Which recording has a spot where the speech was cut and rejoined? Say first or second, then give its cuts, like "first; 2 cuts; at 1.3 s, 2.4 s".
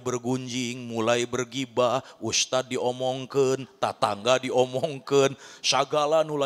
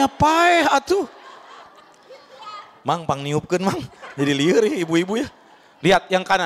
second; 1 cut; at 1.6 s